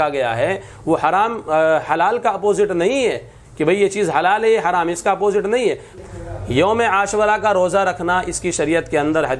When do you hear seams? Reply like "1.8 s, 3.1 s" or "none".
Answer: 5.9 s